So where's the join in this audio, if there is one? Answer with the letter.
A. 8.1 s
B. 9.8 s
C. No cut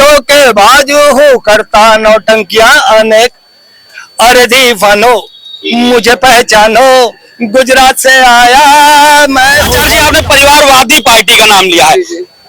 B